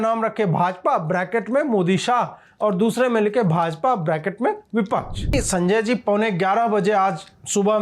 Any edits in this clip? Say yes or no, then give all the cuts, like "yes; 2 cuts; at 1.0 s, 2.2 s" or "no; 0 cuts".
yes; 1 cut; at 5.3 s